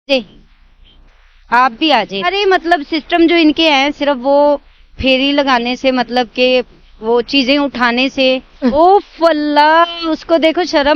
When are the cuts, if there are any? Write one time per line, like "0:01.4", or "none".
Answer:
0:02.2
0:08.5